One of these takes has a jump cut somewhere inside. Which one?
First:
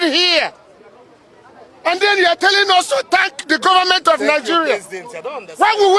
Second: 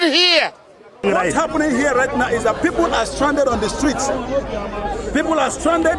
second; 1 cut; at 1.0 s

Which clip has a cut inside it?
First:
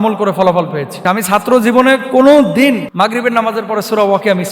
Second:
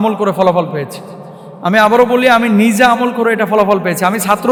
first; 2 cuts; at 1.0 s, 2.9 s

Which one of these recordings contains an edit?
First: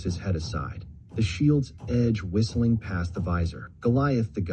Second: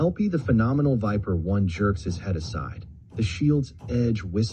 first; 1 cut; at 3.6 s

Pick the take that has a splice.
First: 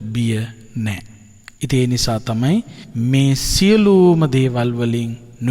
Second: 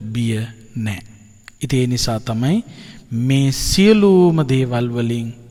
first; 1 cut; at 2.8 s

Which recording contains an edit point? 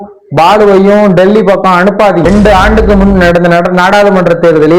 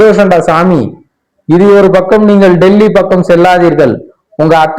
first; 1 cut; at 2.3 s

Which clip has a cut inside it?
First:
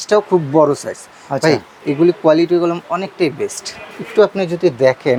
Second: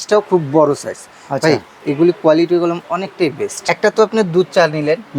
second; 1 cut; at 3.7 s

